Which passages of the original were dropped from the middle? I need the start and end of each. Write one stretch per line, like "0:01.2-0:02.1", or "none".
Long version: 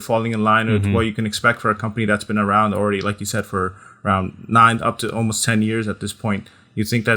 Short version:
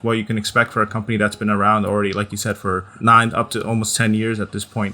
0:03.8-0:04.4